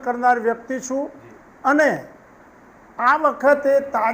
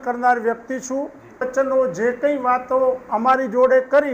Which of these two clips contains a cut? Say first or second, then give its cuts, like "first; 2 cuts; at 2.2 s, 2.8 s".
second; 1 cut; at 1.5 s